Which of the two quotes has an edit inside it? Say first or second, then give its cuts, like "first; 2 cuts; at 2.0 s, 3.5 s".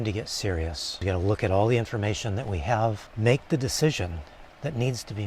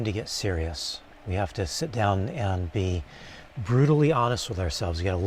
first; 2 cuts; at 0.9 s, 3.1 s